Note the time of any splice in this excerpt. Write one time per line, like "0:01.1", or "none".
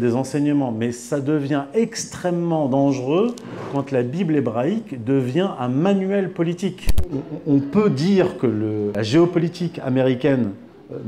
0:07.0
0:08.9